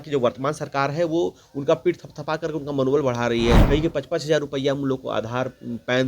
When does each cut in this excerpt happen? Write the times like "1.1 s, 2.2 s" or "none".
3.6 s